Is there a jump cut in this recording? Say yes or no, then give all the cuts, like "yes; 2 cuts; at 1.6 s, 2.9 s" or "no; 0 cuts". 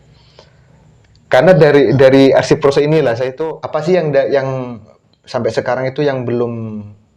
yes; 1 cut; at 3.4 s